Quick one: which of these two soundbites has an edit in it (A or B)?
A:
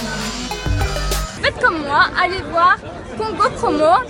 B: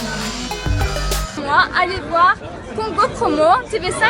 B